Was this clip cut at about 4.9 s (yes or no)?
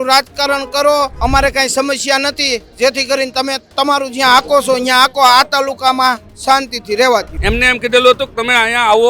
no